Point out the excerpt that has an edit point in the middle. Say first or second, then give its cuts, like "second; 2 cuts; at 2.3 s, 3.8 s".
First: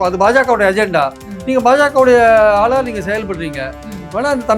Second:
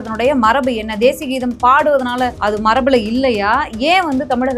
second; 1 cut; at 2.4 s